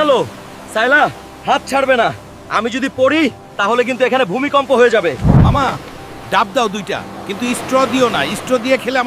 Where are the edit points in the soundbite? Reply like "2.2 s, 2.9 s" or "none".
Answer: 5.2 s